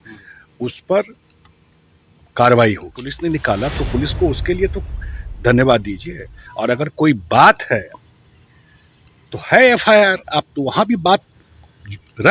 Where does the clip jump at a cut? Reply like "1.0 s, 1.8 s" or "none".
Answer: 3.2 s